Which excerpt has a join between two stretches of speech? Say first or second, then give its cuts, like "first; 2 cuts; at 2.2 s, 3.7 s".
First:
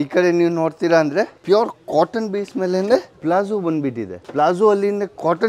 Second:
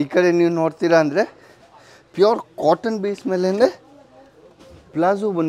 first; 3 cuts; at 1.4 s, 3.1 s, 4.1 s